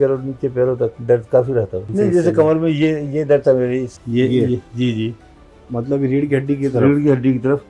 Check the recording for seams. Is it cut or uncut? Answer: cut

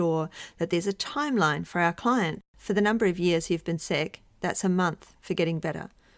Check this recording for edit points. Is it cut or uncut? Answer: cut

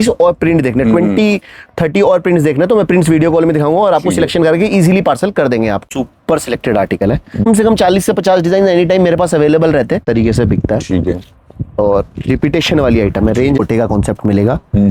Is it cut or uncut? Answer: cut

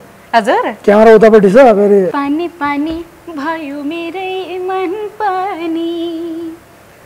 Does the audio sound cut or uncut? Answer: cut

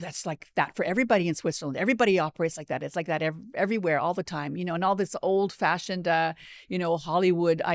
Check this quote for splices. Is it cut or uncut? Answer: uncut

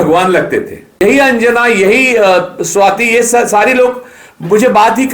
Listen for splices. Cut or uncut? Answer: cut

